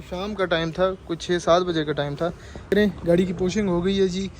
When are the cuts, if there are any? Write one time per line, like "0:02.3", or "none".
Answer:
0:02.7